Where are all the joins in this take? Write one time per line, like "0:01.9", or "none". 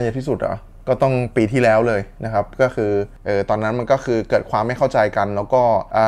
0:03.1